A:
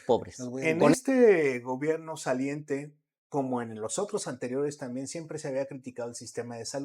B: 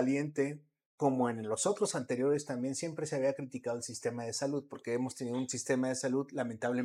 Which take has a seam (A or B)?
A